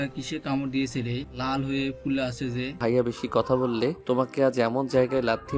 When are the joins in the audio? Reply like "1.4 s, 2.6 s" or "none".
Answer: 1.3 s, 2.7 s, 4.0 s